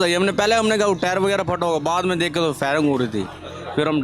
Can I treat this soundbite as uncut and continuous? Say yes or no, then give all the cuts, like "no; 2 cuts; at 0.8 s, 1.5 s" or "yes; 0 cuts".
yes; 0 cuts